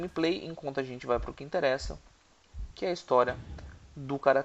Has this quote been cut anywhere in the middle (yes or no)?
no